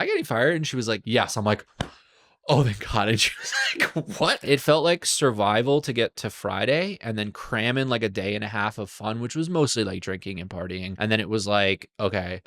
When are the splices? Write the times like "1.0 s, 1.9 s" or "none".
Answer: 1.0 s, 4.4 s, 10.9 s